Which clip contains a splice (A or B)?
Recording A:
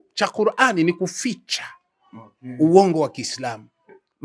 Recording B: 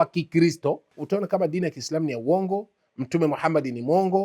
B